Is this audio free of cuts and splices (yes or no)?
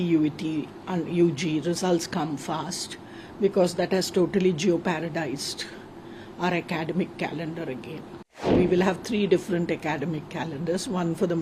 no